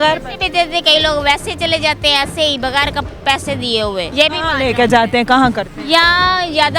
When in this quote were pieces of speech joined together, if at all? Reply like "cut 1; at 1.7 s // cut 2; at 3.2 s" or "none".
cut 1; at 4.1 s